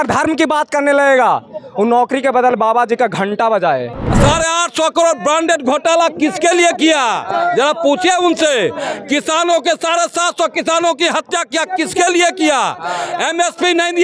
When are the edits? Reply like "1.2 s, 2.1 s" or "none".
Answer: 4.0 s

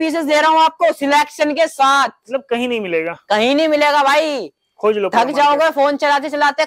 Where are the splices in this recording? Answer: none

